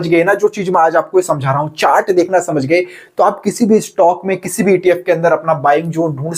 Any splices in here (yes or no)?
no